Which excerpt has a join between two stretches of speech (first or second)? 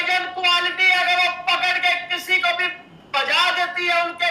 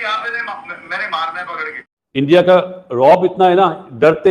second